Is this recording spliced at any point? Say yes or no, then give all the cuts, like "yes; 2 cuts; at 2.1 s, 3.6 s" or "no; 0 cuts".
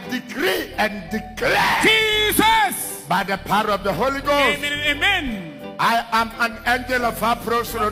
no; 0 cuts